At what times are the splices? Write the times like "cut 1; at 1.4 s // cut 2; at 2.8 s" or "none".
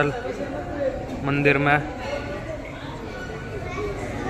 none